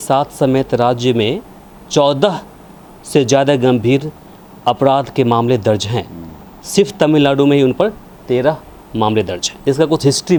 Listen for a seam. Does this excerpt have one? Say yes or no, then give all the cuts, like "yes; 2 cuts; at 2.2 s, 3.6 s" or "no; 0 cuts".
no; 0 cuts